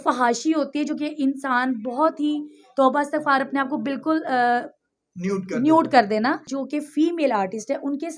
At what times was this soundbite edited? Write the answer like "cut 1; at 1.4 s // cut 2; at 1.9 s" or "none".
cut 1; at 6.5 s